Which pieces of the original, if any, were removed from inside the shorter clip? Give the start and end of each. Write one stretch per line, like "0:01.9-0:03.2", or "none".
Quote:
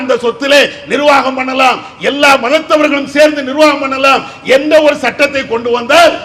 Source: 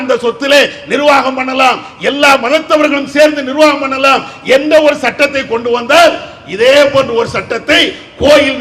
none

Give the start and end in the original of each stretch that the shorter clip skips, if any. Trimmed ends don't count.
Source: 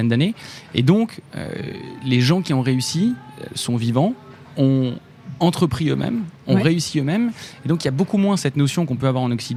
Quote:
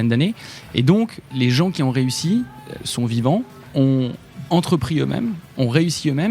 0:01.2-0:01.9
0:04.5-0:04.7

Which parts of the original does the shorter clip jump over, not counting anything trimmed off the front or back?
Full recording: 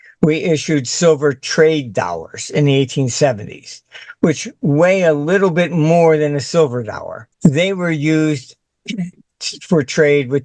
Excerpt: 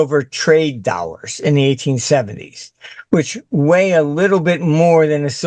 none

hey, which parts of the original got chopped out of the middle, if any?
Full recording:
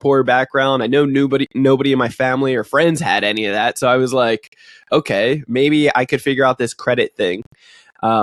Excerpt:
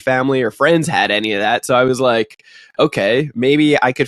none

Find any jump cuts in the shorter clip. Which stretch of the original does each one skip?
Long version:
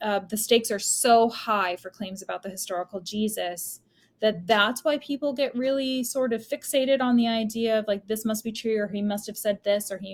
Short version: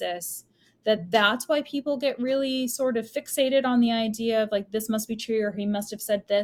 none

